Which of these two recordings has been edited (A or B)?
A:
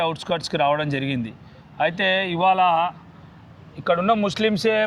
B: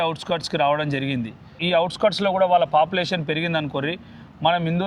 B